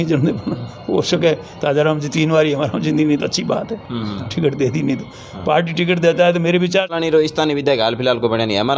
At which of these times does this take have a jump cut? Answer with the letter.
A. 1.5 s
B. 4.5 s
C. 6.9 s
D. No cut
C